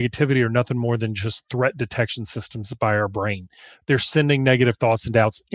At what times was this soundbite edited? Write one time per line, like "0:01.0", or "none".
none